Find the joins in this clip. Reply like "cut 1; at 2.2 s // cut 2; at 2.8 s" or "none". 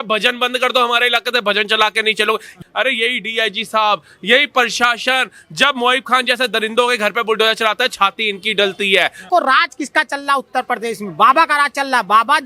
cut 1; at 2.6 s // cut 2; at 9.3 s